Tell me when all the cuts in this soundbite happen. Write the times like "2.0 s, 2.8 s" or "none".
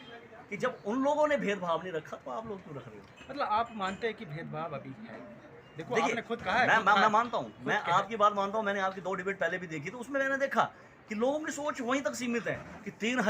none